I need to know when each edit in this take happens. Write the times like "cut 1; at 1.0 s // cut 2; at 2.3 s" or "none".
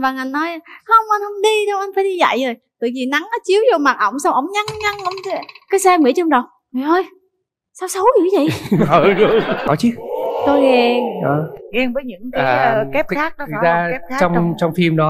cut 1; at 9.6 s